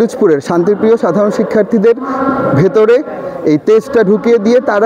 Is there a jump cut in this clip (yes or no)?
no